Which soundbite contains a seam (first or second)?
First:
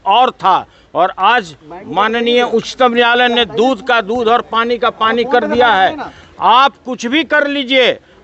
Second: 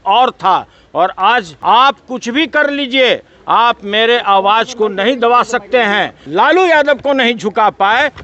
second